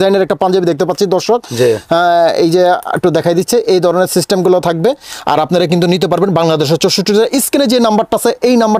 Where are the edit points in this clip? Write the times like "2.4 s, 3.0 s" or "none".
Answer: none